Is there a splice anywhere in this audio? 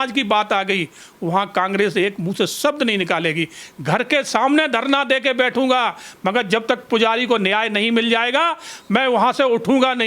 yes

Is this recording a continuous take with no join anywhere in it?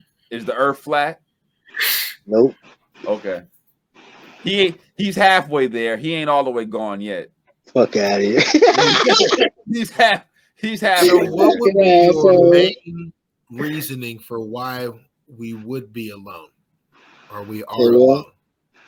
yes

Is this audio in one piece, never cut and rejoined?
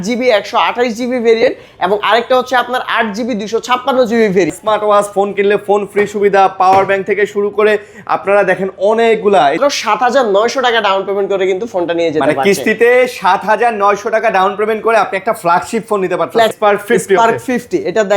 no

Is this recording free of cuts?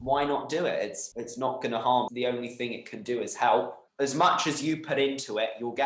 no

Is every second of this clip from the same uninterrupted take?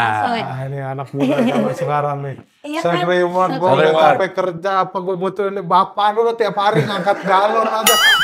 yes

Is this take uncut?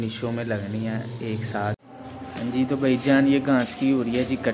no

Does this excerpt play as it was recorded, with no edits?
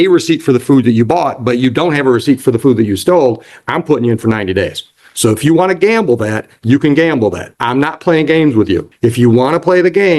no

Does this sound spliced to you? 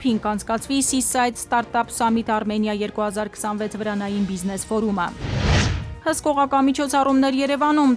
yes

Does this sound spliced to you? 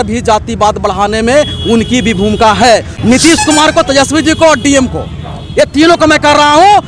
yes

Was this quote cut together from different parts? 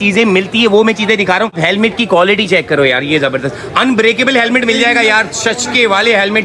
yes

